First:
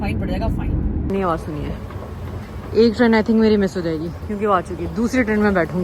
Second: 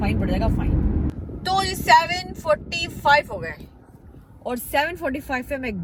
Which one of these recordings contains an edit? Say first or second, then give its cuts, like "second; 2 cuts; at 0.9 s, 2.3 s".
first; 1 cut; at 1.1 s